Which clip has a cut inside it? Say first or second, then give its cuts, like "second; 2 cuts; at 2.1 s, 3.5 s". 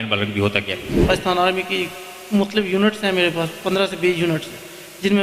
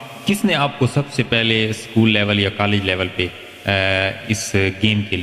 first; 1 cut; at 1.0 s